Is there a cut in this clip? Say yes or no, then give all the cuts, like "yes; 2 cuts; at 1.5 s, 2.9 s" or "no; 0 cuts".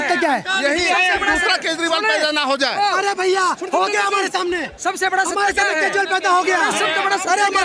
no; 0 cuts